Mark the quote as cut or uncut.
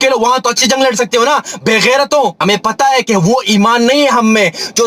cut